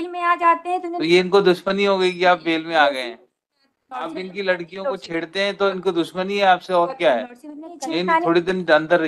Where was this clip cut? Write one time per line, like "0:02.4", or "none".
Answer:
0:04.1
0:07.7